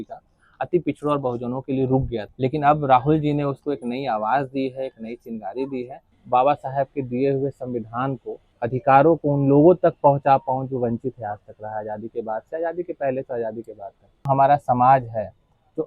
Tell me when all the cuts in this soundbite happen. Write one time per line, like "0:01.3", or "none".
0:02.3
0:06.1
0:08.5
0:14.3